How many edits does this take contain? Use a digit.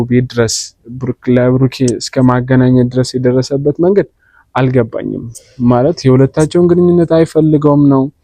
0